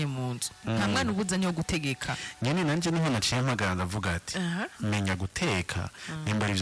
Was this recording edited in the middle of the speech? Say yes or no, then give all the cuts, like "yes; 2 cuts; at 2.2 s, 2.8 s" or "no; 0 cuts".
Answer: no; 0 cuts